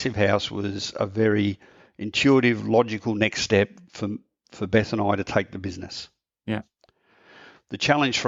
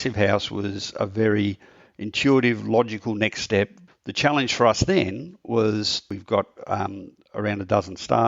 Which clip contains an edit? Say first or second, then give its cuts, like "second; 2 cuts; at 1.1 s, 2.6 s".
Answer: second; 2 cuts; at 3.9 s, 6.1 s